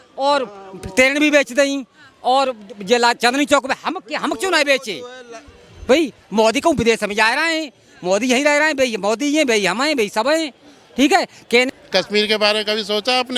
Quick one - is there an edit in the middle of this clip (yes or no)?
yes